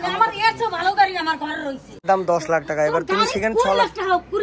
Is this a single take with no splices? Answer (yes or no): no